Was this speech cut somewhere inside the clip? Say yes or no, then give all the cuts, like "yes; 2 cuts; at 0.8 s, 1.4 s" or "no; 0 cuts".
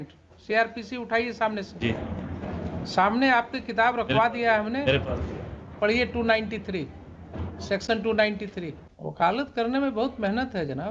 no; 0 cuts